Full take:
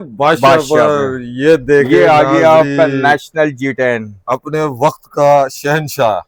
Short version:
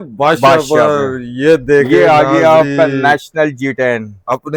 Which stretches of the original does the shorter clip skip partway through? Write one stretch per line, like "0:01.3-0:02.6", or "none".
none